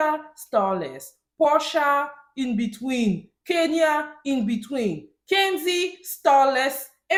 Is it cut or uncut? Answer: uncut